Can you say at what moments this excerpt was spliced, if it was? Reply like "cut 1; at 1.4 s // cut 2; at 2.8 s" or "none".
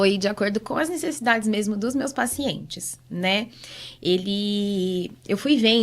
none